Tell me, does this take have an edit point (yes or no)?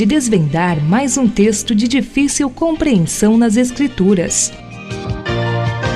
yes